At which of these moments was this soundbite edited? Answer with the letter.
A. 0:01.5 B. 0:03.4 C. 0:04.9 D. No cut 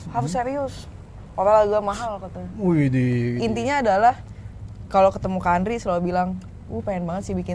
B